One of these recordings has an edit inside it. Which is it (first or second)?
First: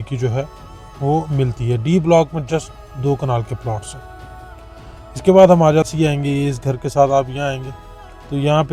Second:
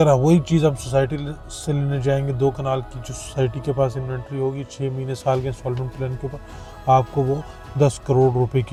first